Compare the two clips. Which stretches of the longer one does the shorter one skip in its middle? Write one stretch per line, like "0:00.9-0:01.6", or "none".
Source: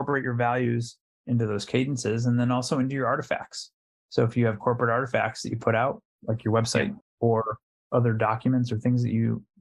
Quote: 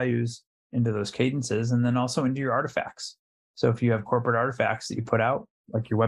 none